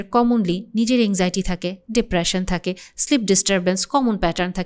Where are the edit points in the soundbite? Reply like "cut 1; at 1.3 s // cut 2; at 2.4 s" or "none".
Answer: none